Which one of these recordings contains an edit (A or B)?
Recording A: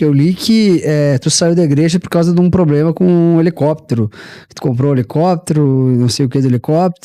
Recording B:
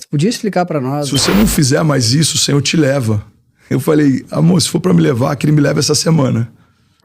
B